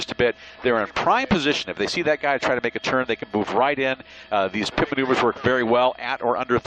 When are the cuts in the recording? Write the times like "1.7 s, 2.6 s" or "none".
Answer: 1.0 s

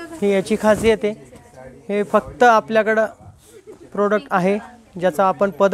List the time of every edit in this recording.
none

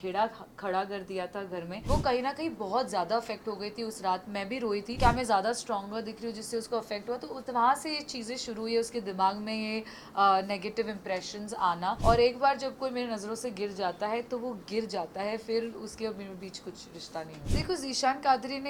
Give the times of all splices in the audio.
1.7 s, 4.9 s, 12.0 s, 17.4 s

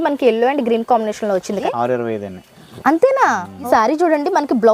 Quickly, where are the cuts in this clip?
1.5 s, 2.7 s, 3.7 s

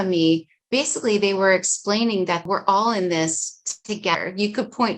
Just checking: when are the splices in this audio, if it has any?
2.4 s

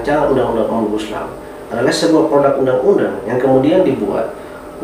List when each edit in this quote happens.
none

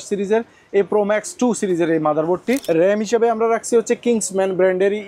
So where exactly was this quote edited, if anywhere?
2.6 s

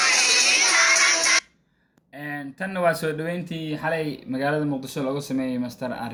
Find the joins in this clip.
none

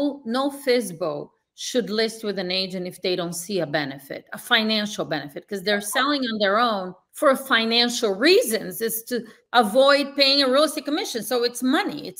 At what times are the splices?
7.0 s, 9.4 s

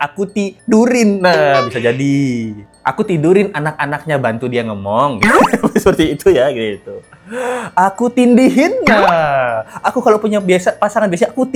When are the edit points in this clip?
none

